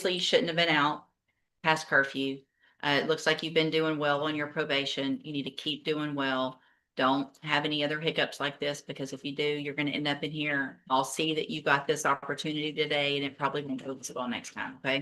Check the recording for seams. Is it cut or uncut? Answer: uncut